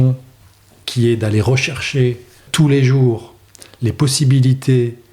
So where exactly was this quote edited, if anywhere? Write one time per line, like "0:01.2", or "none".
0:02.4